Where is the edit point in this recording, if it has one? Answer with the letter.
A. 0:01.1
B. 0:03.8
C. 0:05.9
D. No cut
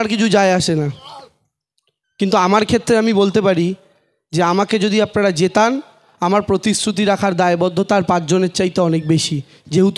D